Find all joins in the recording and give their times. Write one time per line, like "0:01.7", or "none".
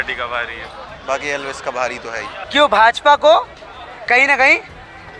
0:02.3